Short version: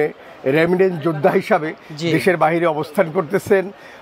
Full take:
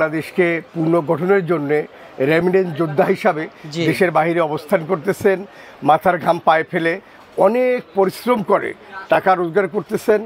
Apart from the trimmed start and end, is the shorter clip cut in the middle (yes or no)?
no